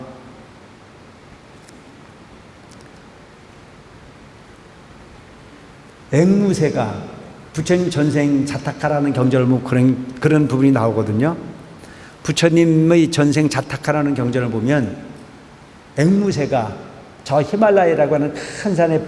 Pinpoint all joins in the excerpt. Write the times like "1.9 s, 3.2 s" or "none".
1.5 s

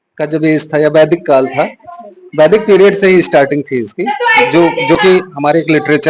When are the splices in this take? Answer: none

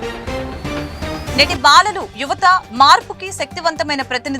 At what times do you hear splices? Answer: 1.2 s

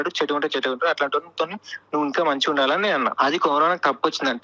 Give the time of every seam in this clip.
3.1 s

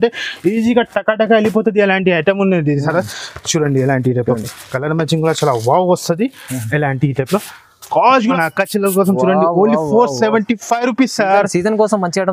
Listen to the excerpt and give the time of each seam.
8.3 s

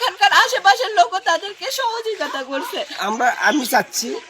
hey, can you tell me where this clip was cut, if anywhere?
2.9 s

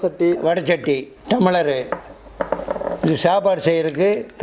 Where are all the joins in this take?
1.1 s

